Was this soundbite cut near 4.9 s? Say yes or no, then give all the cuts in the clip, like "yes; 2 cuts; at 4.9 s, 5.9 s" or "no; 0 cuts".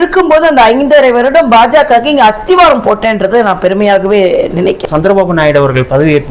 yes; 1 cut; at 4.9 s